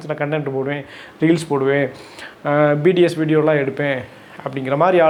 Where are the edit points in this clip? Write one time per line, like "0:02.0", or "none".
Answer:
none